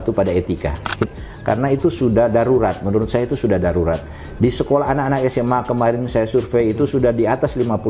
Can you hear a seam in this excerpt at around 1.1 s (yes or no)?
yes